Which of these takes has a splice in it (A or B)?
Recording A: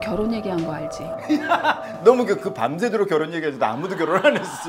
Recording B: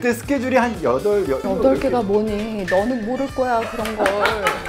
B